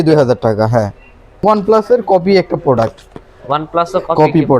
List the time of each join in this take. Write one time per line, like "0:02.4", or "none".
0:01.3